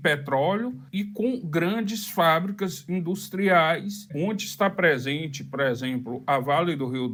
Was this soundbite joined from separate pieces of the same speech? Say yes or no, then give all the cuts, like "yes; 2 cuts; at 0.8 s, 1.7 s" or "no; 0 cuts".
no; 0 cuts